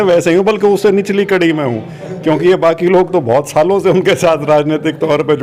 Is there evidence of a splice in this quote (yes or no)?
no